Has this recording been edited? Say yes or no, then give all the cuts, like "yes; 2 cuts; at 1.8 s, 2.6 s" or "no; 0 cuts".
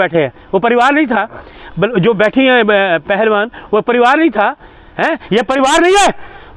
no; 0 cuts